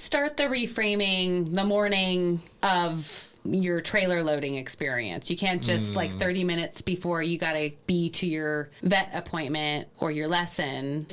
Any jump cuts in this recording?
no; 0 cuts

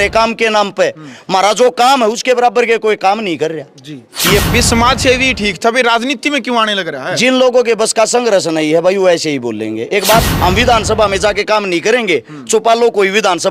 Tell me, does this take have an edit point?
yes; 2 cuts; at 4.4 s, 10.3 s

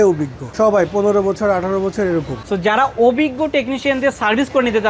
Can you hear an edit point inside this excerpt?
yes; 1 cut; at 2.4 s

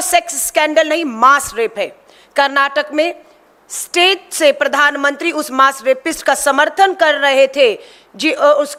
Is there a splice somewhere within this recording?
no; 0 cuts

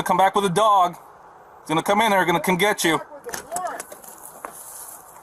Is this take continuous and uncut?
yes; 0 cuts

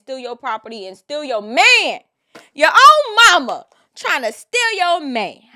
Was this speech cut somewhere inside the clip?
no; 0 cuts

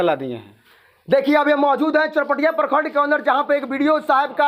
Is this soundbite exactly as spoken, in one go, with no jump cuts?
yes; 0 cuts

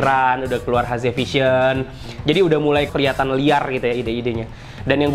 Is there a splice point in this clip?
yes; 1 cut; at 2.9 s

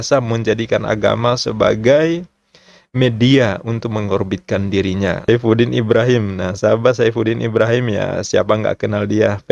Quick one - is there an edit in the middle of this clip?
yes; 1 cut; at 5.3 s

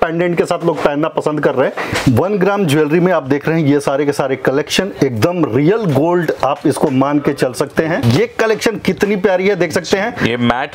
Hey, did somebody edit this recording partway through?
yes; 2 cuts; at 1.9 s, 8.0 s

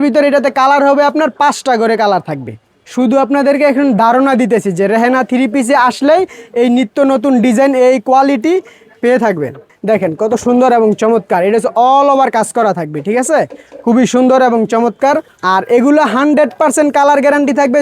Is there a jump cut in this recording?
yes; 3 cuts; at 2.7 s, 9.7 s, 15.3 s

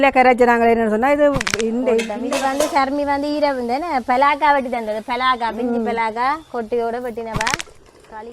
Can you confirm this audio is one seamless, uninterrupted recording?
no; 1 cut; at 2.1 s

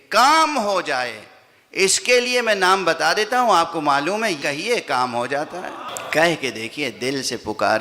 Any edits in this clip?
yes; 2 cuts; at 4.4 s, 5.9 s

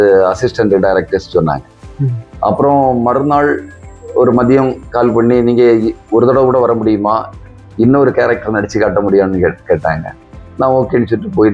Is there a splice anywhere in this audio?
no; 0 cuts

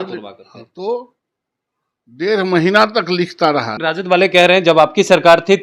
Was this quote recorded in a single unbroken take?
no; 1 cut; at 3.7 s

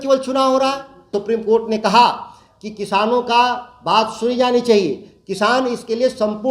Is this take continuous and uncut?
no; 1 cut; at 1.1 s

